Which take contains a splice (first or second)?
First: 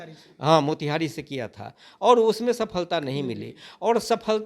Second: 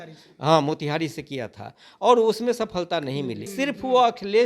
second